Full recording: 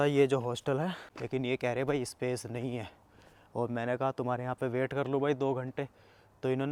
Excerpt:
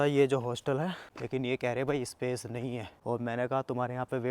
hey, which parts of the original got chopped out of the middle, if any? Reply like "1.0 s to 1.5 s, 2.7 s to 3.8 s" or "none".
2.9 s to 3.4 s